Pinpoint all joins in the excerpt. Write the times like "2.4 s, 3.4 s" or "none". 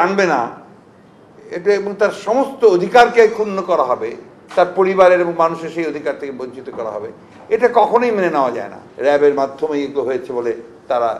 8.8 s